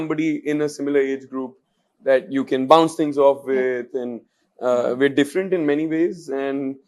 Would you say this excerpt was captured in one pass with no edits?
yes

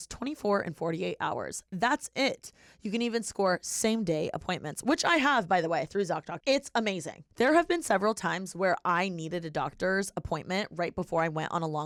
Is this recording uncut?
yes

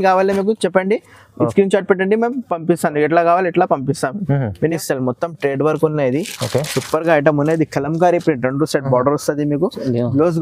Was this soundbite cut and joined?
yes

